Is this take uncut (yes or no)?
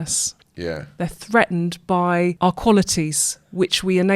no